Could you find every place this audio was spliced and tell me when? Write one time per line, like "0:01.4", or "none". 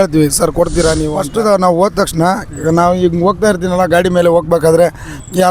0:01.2